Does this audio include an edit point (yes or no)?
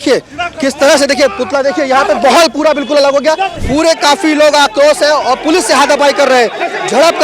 yes